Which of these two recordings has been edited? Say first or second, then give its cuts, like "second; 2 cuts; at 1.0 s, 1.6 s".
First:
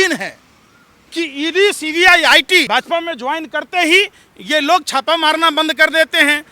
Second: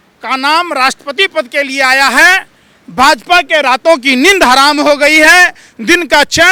first; 1 cut; at 2.7 s